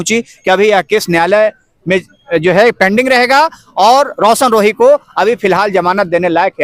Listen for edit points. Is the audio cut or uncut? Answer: uncut